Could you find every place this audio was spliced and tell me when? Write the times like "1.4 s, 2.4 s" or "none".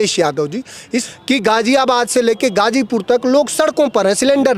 1.0 s